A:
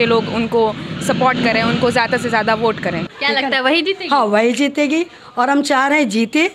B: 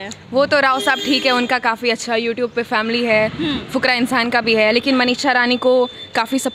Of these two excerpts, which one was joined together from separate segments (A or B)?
A